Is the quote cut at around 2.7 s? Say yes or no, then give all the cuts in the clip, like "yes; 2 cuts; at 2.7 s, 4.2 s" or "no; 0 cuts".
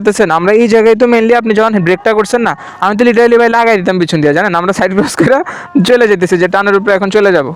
no; 0 cuts